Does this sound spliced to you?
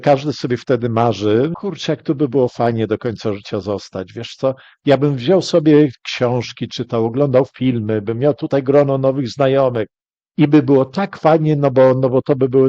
yes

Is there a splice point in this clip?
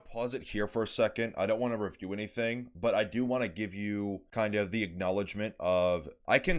no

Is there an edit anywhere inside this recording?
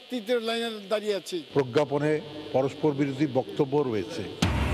yes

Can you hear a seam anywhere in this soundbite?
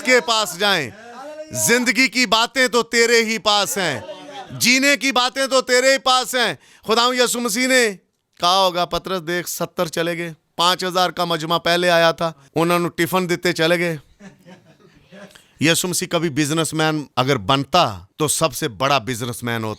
yes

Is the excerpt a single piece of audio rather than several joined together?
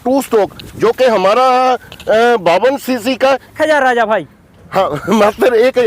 no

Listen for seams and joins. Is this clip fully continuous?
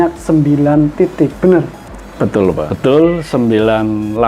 no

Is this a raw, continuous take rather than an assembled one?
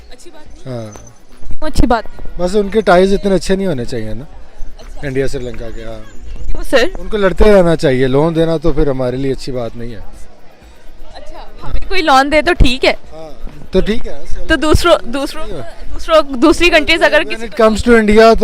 yes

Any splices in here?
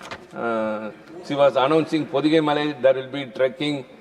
no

